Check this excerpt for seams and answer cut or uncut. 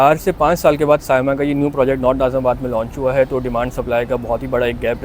uncut